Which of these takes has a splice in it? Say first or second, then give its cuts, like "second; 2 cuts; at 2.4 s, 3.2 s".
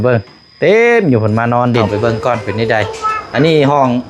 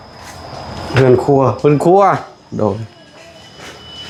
first; 1 cut; at 1.9 s